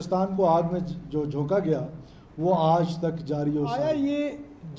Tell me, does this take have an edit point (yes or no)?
yes